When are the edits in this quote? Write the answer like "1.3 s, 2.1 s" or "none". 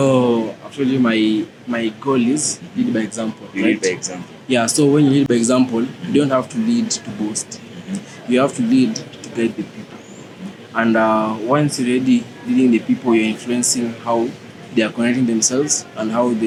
none